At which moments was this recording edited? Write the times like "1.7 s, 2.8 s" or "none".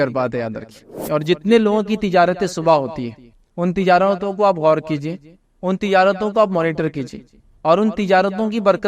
0.9 s